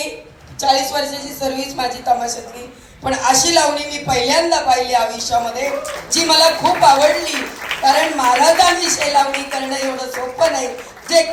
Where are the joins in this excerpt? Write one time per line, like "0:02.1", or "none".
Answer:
none